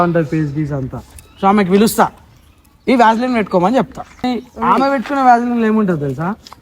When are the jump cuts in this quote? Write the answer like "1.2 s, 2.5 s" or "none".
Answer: 4.3 s